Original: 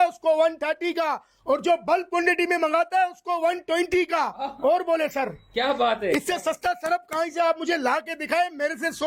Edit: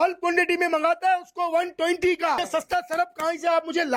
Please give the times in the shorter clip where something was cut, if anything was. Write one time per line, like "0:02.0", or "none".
0:02.4

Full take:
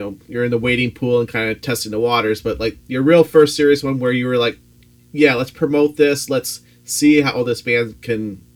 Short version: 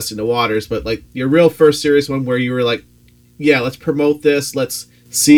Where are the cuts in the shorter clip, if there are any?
none

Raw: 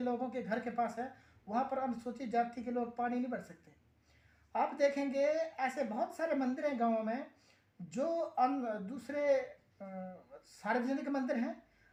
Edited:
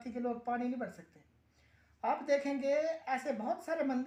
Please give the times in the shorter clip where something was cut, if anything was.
none

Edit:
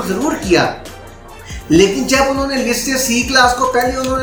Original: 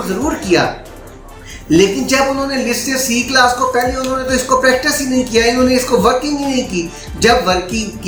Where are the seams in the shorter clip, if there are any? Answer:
none

